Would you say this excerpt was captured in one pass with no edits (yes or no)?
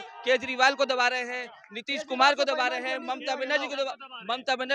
yes